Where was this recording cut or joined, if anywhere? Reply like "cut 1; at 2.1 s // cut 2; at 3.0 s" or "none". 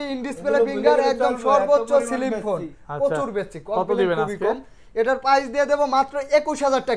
none